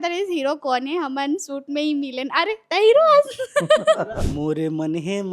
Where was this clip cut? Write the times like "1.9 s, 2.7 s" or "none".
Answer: 4.2 s